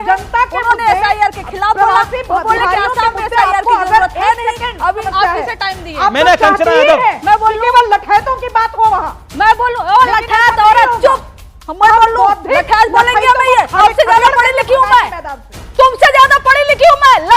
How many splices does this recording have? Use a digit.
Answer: 2